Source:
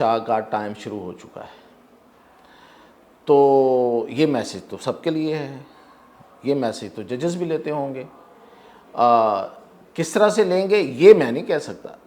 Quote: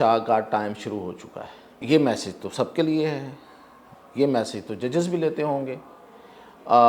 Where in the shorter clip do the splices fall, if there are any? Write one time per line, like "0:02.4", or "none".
0:01.8